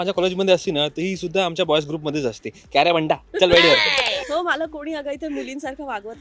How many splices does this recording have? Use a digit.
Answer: 1